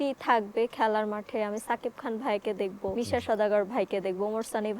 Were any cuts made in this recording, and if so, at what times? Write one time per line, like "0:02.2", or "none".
0:02.9